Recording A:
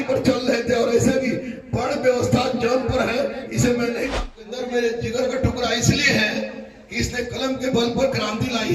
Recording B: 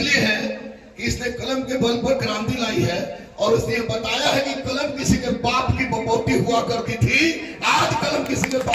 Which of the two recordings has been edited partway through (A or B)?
A